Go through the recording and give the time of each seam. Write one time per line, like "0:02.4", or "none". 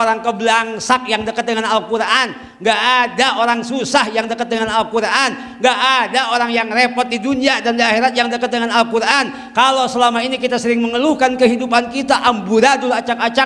none